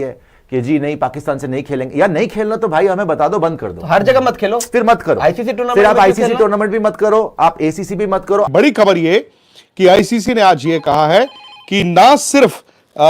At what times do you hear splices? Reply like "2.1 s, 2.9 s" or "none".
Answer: 8.5 s